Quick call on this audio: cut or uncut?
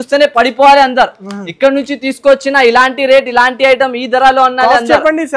uncut